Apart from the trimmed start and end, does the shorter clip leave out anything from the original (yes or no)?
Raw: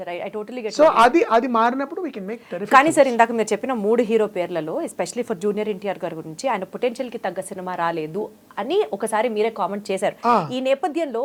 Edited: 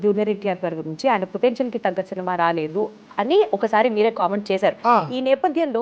no